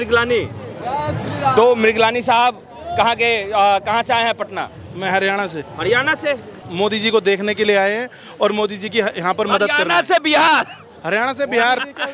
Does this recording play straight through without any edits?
no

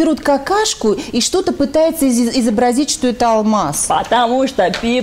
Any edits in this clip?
no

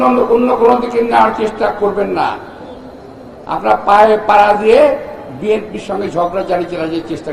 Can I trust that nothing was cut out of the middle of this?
yes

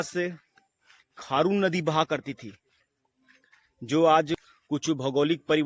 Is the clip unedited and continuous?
no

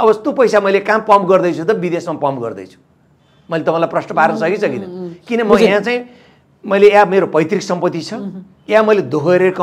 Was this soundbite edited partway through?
no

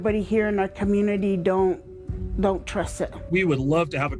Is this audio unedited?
no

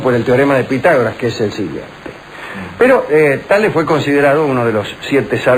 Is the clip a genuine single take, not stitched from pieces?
yes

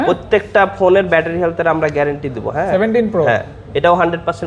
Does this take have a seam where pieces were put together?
yes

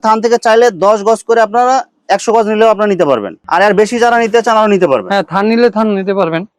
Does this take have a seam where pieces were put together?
no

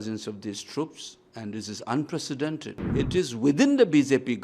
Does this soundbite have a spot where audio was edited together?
yes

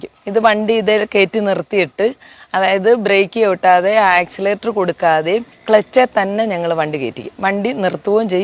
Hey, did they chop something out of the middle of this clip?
no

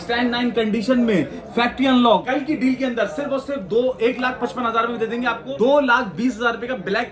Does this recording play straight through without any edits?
no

